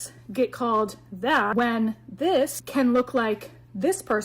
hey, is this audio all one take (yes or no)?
no